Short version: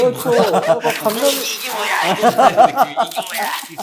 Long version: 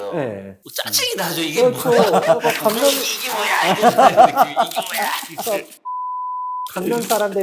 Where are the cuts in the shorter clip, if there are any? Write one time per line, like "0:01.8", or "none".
none

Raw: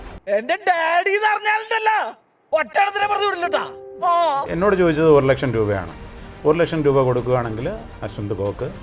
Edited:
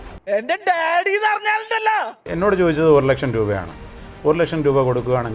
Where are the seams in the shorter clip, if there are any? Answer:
0:02.3

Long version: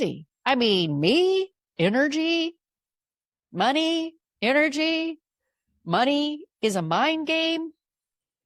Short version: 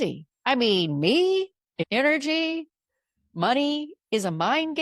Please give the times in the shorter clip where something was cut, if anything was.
0:01.7

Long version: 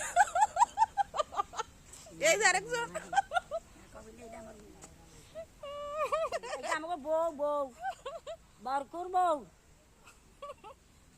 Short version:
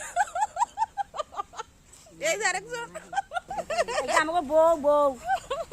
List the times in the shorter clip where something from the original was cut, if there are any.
0:03.8

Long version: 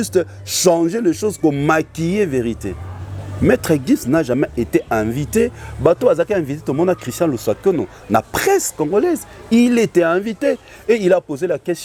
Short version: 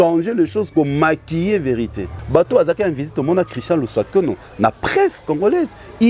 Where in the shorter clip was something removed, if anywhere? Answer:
0:02.1

